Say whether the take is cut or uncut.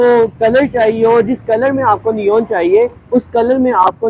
uncut